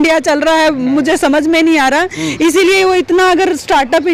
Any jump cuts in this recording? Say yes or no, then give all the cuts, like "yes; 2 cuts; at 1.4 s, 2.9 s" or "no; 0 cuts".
no; 0 cuts